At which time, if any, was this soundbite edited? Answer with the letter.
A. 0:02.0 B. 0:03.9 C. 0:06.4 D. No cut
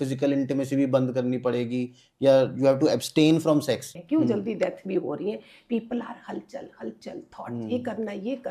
B